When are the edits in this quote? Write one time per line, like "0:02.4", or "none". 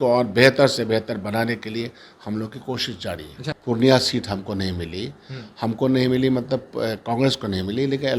0:03.4